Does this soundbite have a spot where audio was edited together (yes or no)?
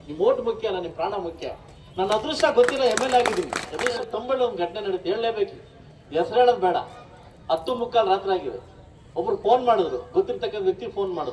yes